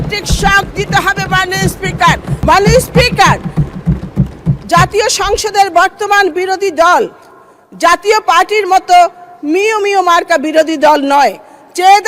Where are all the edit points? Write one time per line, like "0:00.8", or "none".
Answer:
0:02.4